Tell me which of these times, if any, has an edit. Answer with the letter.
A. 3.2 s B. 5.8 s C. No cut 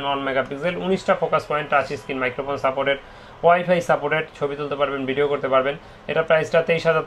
C